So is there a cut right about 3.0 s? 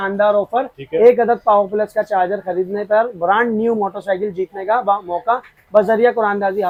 no; 0 cuts

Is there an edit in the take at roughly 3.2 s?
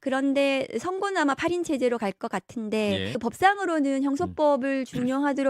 yes; 1 cut; at 3.2 s

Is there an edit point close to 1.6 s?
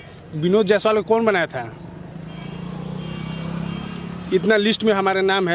no; 0 cuts

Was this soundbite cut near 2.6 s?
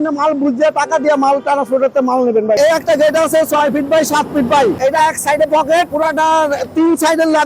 yes; 3 cuts; at 2.6 s, 4.8 s, 5.9 s

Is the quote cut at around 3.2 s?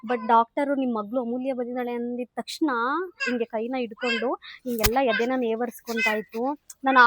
yes; 1 cut; at 3.2 s

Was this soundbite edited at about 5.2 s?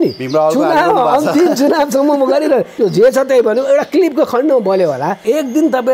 yes; 2 cuts; at 2.7 s, 5.2 s

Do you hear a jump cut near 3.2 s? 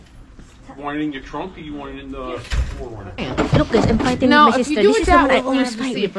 yes; 1 cut; at 3.2 s

